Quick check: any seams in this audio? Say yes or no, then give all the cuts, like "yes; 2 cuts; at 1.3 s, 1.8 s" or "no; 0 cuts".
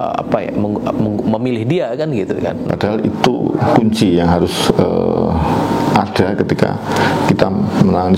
yes; 1 cut; at 2.7 s